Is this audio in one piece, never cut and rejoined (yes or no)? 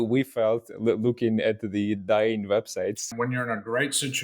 no